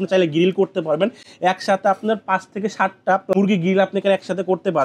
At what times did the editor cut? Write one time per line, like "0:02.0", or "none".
0:03.3